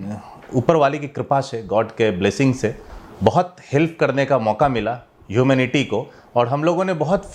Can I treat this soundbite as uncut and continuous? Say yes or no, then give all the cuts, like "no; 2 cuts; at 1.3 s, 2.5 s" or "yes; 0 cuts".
yes; 0 cuts